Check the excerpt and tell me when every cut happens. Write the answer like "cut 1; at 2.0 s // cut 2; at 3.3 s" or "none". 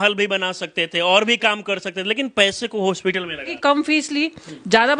cut 1; at 3.5 s